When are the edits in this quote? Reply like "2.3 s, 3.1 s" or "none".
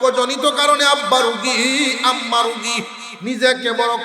3.0 s